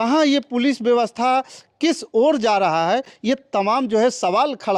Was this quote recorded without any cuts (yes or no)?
yes